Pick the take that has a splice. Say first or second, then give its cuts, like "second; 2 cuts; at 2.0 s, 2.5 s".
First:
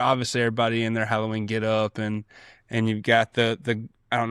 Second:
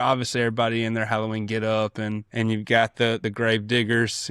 second; 2 cuts; at 2.2 s, 3.2 s